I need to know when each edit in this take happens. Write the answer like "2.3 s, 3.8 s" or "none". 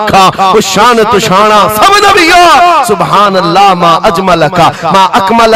none